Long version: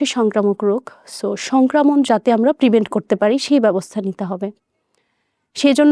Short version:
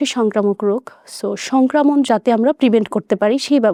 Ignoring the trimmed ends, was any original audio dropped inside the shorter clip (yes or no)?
no